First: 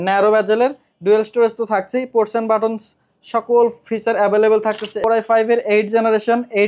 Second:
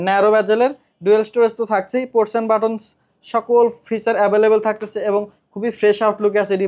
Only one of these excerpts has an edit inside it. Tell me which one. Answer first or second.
first